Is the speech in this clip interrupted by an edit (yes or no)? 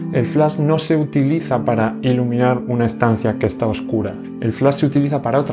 yes